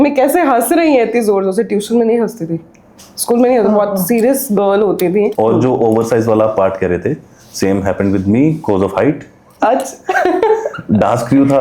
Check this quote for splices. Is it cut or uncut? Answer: cut